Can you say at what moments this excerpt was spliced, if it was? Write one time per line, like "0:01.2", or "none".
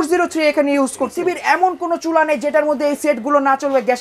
0:01.1